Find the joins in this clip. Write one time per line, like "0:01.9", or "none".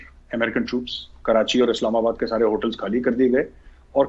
none